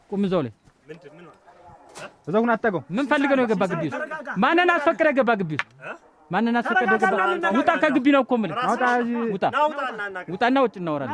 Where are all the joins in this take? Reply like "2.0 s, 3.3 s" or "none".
none